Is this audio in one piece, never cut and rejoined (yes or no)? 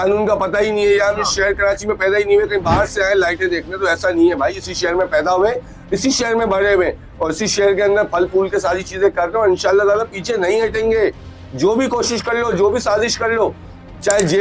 yes